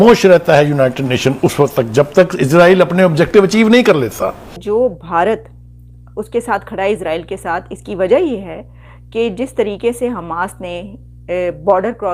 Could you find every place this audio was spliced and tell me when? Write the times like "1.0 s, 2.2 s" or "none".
4.6 s